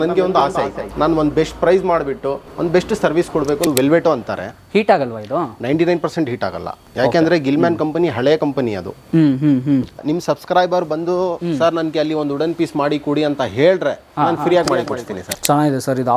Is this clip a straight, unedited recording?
no; 3 cuts; at 3.7 s, 10.0 s, 15.2 s

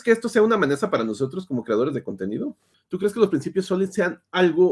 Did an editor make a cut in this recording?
yes; 1 cut; at 2.8 s

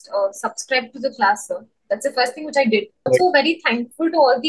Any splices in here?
yes; 1 cut; at 3.1 s

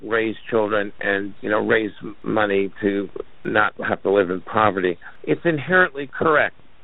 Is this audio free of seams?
no; 4 cuts; at 1.3 s, 2.2 s, 3.4 s, 5.1 s

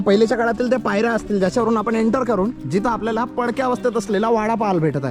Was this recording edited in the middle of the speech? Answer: yes; 1 cut; at 2.6 s

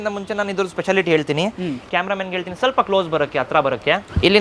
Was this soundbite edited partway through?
yes; 1 cut; at 1.8 s

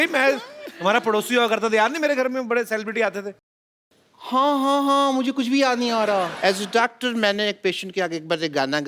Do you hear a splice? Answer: yes; 2 cuts; at 3.7 s, 6.3 s

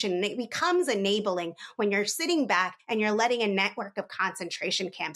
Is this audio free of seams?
yes; 0 cuts

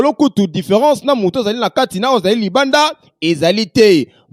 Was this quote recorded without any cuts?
yes; 0 cuts

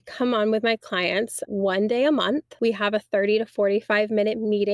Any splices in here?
yes; 2 cuts; at 1.5 s, 2.5 s

